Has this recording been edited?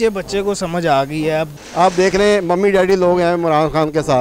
yes; 1 cut; at 1.5 s

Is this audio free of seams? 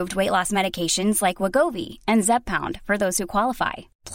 yes; 0 cuts

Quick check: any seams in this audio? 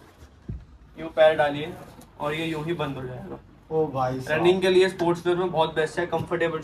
no; 0 cuts

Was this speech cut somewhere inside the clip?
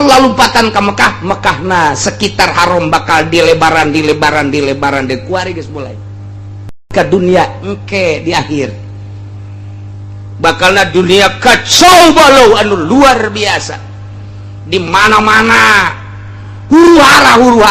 yes; 1 cut; at 6.9 s

